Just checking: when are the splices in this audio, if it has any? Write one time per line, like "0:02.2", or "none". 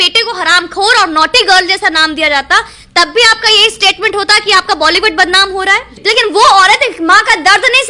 0:05.9